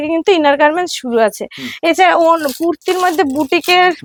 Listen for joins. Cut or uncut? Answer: uncut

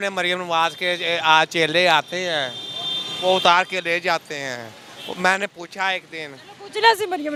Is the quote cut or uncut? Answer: uncut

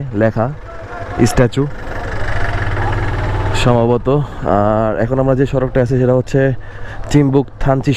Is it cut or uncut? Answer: uncut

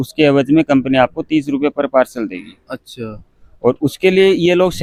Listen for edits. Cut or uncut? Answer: uncut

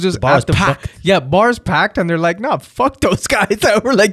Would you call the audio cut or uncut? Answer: uncut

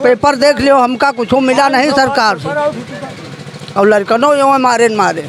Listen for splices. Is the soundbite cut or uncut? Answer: uncut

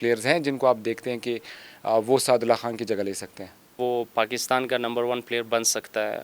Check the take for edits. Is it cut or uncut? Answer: cut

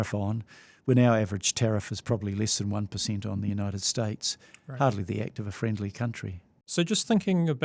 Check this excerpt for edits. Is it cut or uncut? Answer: uncut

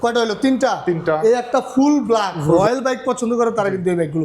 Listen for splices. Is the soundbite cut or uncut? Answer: cut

